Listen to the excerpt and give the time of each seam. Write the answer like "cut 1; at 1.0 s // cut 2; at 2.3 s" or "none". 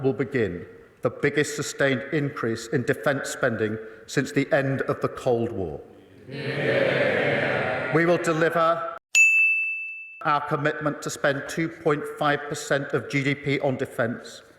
cut 1; at 10.2 s